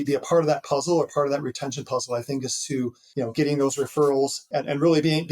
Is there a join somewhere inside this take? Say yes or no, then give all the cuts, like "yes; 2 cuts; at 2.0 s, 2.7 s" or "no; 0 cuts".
yes; 2 cuts; at 3.0 s, 4.4 s